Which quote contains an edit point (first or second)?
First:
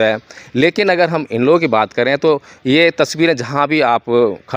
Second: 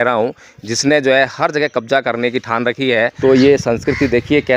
second